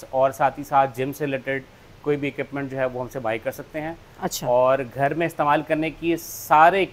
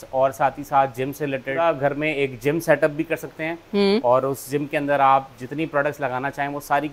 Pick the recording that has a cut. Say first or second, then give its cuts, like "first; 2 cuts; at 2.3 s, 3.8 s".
second; 1 cut; at 1.6 s